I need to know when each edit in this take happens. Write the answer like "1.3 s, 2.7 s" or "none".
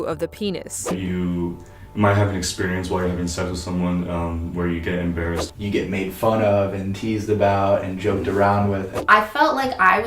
0.9 s, 5.5 s, 8.9 s